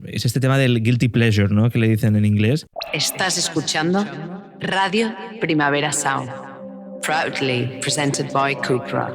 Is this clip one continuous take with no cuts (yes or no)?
no